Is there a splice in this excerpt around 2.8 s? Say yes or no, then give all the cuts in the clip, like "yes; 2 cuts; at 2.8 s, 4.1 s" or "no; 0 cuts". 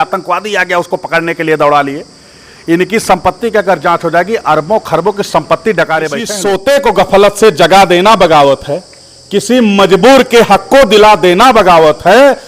no; 1 cut; at 6.3 s